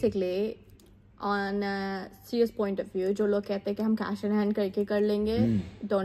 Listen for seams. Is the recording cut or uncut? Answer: uncut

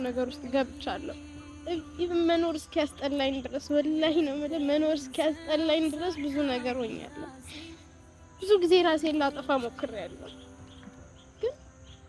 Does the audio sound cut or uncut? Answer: uncut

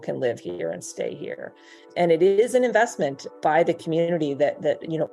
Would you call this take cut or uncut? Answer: cut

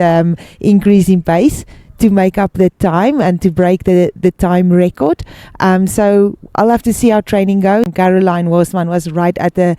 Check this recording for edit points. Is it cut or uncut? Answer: cut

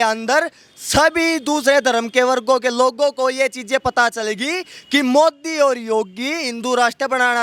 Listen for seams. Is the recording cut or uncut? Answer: uncut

